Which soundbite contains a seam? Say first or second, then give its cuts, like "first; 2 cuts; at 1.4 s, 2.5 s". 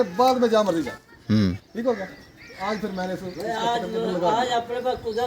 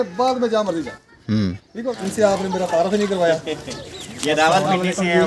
second; 1 cut; at 1.9 s